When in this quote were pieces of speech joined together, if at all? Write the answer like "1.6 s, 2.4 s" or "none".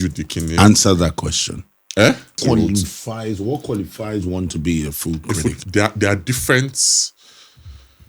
2.4 s